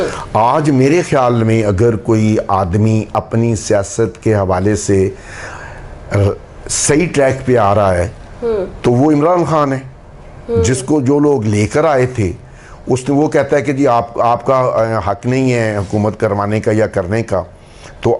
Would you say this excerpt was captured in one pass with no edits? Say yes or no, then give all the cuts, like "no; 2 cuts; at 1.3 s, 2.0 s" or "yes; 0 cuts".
yes; 0 cuts